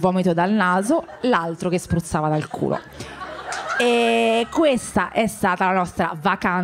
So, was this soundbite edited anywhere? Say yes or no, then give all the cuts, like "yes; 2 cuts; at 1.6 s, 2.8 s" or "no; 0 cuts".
no; 0 cuts